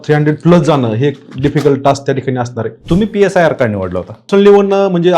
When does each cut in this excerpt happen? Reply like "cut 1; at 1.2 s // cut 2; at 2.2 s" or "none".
cut 1; at 2.7 s // cut 2; at 4.3 s